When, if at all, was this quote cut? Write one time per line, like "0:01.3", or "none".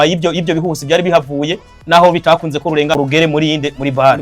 0:02.9